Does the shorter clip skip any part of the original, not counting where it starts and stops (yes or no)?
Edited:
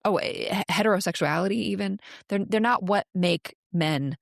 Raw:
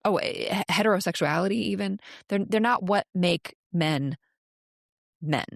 no